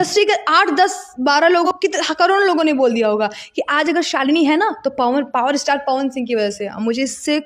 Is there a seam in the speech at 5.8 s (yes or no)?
no